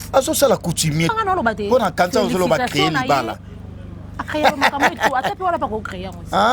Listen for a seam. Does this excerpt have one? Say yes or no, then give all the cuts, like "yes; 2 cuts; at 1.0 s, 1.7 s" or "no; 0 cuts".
yes; 1 cut; at 1.1 s